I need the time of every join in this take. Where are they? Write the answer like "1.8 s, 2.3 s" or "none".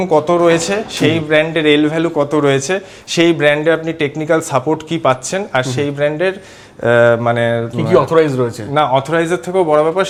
none